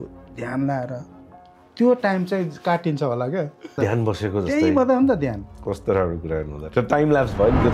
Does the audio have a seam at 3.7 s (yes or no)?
yes